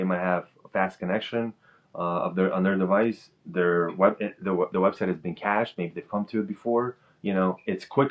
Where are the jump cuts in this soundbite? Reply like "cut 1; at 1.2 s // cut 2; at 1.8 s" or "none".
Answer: none